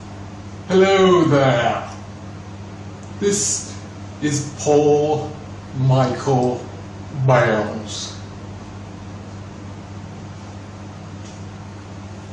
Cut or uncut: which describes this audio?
cut